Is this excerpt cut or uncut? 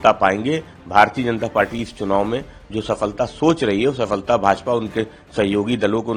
uncut